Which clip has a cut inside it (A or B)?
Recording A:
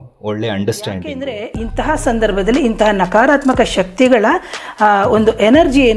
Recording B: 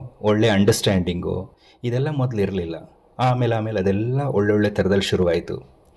A